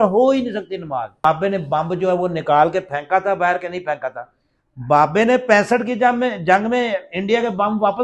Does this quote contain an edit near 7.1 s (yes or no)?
no